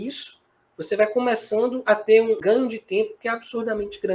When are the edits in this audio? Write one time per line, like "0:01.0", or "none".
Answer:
0:02.4